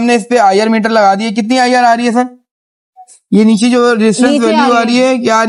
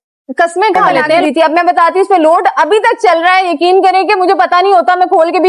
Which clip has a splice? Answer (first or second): second